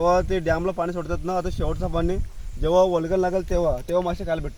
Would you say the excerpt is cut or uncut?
uncut